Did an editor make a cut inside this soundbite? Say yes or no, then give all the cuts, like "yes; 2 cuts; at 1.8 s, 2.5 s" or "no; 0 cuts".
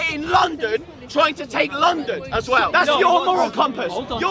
yes; 1 cut; at 2.7 s